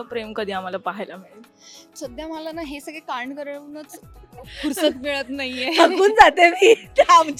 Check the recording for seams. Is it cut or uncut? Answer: uncut